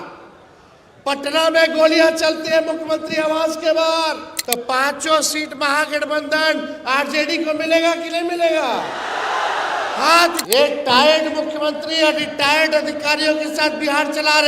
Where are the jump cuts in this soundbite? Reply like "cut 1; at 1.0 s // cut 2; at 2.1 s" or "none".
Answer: cut 1; at 4.3 s // cut 2; at 10.4 s